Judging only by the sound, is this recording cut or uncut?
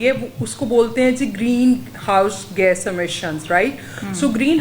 uncut